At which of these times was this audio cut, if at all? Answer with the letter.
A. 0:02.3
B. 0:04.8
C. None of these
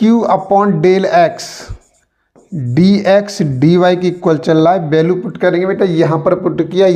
C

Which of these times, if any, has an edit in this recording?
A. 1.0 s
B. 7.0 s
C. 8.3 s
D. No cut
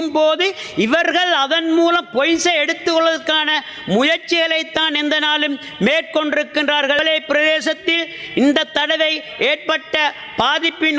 B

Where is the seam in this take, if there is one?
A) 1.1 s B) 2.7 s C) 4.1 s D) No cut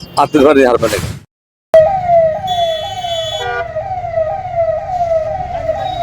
A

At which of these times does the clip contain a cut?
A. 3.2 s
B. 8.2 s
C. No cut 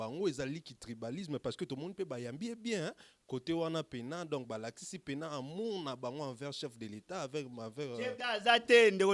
B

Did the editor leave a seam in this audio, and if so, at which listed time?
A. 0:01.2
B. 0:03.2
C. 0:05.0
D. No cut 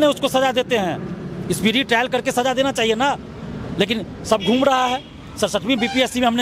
D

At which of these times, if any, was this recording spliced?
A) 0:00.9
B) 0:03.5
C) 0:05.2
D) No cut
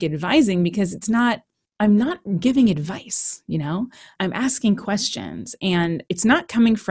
D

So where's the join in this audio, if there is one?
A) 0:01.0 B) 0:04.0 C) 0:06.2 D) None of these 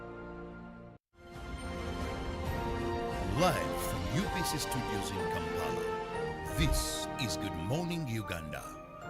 A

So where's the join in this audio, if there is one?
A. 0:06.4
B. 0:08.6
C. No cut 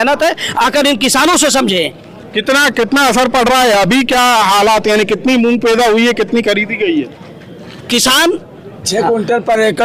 C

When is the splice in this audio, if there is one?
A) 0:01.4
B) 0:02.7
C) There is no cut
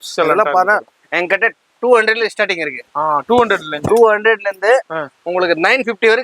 C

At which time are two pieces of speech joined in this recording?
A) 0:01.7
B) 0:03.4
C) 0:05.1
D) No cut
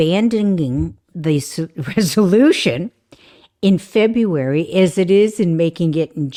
D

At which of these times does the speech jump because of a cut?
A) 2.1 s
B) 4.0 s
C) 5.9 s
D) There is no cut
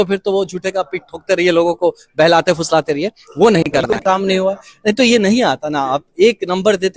B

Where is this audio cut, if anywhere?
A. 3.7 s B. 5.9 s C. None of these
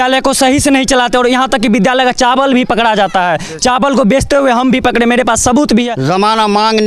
B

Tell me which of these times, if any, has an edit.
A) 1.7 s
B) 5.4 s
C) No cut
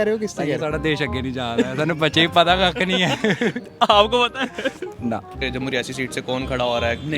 B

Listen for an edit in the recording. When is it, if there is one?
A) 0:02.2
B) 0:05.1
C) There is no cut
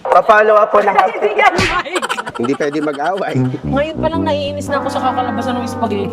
A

